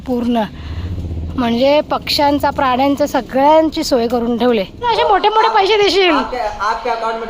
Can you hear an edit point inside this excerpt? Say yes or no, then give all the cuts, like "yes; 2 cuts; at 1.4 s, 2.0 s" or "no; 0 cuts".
yes; 1 cut; at 4.8 s